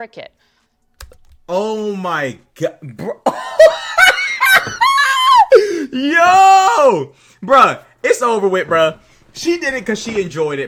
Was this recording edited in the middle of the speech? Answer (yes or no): no